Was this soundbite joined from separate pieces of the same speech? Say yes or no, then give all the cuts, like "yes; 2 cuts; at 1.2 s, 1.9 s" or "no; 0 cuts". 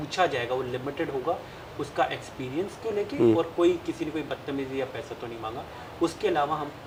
no; 0 cuts